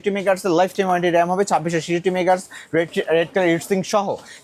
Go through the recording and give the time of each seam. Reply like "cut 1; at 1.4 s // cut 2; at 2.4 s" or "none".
none